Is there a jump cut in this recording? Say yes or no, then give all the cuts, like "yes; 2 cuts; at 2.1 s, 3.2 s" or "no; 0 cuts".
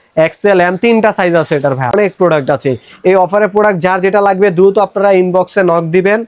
yes; 1 cut; at 1.9 s